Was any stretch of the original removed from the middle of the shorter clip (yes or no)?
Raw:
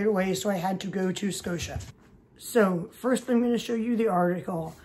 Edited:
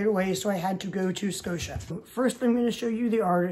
yes